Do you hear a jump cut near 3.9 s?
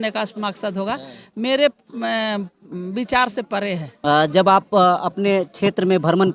yes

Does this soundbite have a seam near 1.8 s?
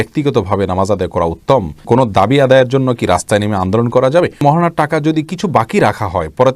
yes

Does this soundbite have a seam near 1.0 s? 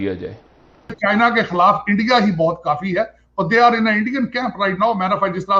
yes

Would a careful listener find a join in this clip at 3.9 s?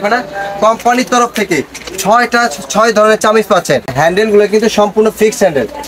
yes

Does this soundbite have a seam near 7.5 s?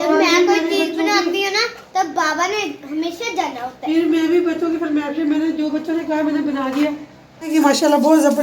yes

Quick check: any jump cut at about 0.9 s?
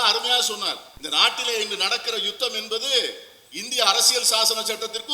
yes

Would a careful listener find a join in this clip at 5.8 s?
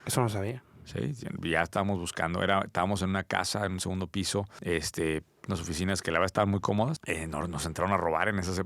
no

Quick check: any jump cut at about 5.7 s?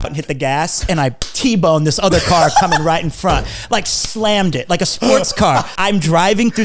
yes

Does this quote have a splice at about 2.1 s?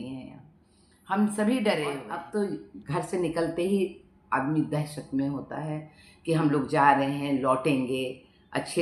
yes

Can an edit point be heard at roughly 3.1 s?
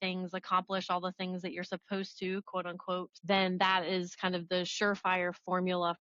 yes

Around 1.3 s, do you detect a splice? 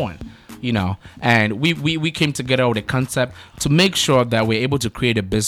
no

